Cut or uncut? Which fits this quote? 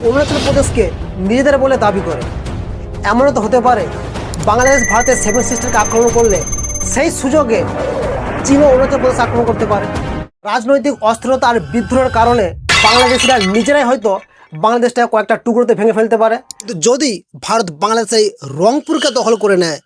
cut